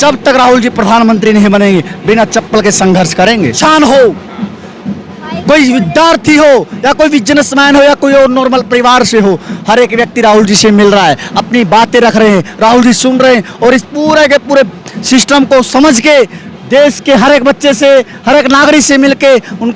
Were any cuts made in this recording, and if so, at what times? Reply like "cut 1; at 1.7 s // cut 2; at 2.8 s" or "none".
cut 1; at 3.6 s